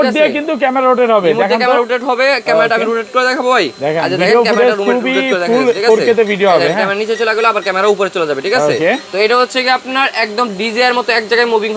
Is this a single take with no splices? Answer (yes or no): yes